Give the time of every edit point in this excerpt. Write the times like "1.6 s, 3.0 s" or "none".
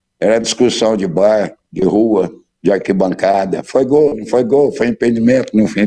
none